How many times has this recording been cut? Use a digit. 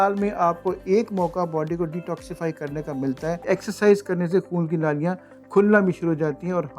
1